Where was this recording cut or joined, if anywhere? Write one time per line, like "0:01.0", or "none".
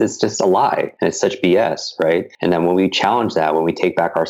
0:00.9
0:02.3